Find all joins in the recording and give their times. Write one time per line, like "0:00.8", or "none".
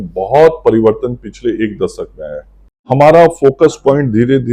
0:02.9